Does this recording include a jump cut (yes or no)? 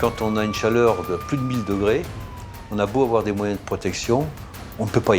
no